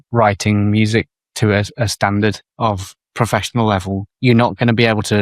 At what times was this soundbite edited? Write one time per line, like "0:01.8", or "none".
0:02.8
0:04.1